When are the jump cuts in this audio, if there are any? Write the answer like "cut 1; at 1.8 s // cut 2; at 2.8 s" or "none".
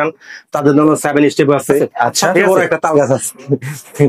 cut 1; at 2.5 s